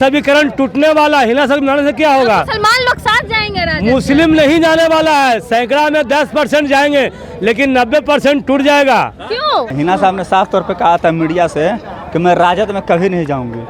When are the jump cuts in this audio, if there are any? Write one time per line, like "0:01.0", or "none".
0:09.7